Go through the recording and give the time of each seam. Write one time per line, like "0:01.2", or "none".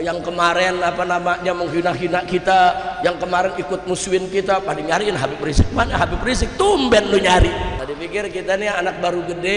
0:07.8